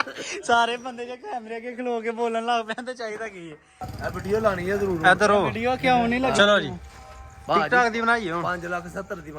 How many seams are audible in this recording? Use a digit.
1